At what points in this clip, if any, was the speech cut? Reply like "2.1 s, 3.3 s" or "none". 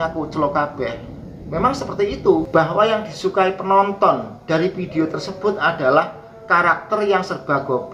2.5 s